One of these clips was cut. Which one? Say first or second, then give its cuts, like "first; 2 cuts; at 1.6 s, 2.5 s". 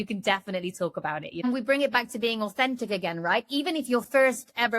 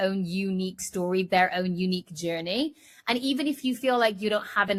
first; 1 cut; at 1.4 s